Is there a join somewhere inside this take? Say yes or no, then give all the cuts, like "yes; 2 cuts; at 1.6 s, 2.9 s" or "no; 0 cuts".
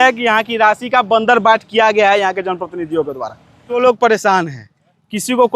yes; 1 cut; at 3.8 s